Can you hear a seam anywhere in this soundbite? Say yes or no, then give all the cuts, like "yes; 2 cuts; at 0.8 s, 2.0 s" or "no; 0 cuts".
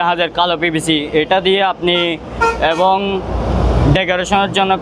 no; 0 cuts